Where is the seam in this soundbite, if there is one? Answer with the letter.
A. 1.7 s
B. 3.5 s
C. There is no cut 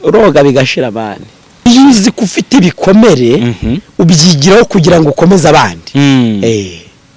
A